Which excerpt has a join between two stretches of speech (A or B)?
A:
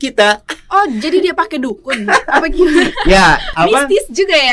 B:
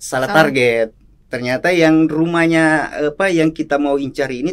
A